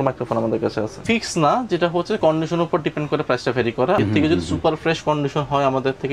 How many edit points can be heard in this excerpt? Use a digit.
2